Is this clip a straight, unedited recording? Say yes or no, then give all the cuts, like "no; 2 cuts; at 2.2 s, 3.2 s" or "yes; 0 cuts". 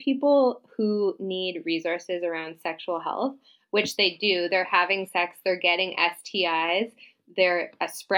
yes; 0 cuts